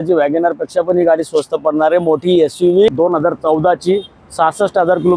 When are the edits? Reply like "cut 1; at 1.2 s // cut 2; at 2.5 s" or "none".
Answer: cut 1; at 2.9 s